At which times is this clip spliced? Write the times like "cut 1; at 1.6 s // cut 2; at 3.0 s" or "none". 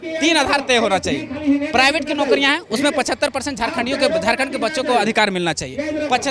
none